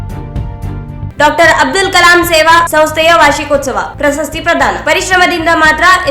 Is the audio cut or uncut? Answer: cut